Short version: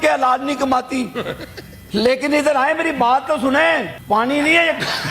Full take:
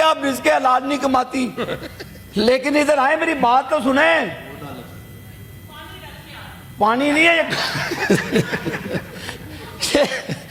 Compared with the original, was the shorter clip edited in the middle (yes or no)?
yes